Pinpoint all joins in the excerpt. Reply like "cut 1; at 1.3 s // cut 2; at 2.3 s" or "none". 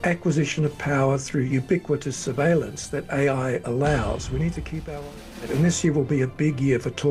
cut 1; at 1.5 s // cut 2; at 5.5 s